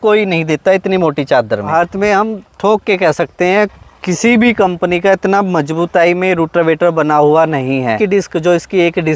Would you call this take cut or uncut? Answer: cut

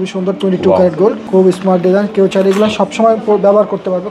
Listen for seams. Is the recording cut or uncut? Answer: cut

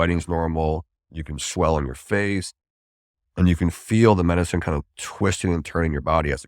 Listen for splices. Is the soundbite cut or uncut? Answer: cut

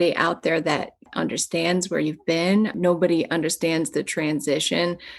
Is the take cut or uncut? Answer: cut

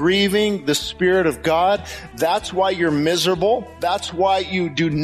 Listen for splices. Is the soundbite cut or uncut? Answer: cut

